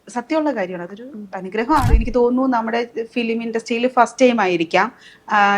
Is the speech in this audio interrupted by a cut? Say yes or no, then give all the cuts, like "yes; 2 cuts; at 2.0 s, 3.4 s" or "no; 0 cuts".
yes; 1 cut; at 2.0 s